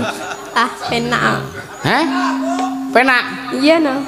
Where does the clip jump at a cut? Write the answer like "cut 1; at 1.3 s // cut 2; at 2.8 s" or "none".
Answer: none

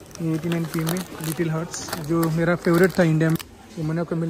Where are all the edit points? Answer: cut 1; at 3.4 s

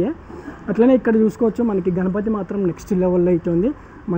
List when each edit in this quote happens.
none

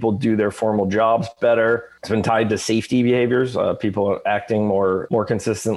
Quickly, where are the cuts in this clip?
cut 1; at 2.0 s

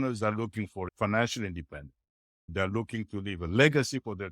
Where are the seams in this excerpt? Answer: cut 1; at 0.9 s

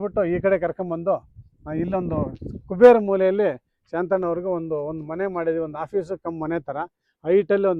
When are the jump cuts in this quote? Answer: none

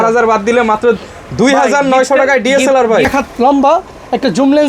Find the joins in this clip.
cut 1; at 3.1 s

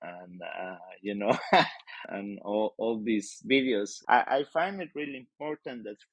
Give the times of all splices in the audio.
cut 1; at 3.9 s

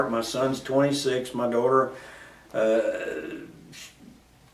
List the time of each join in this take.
cut 1; at 1.2 s

